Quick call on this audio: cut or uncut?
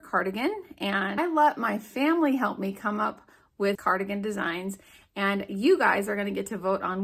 cut